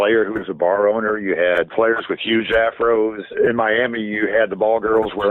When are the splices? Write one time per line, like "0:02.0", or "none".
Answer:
0:01.7
0:03.3